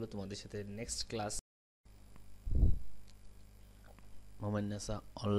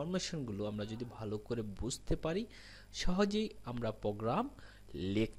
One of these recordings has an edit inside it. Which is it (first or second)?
first